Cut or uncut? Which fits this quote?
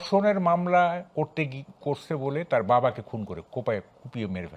uncut